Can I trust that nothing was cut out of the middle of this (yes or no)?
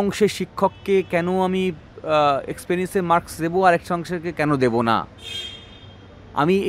yes